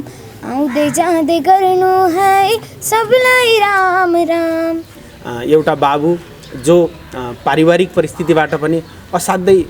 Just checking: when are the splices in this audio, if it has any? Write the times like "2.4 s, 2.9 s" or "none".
5.1 s